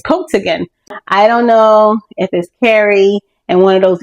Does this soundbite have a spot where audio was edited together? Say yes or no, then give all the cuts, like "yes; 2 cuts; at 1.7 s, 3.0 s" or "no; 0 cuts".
yes; 1 cut; at 0.9 s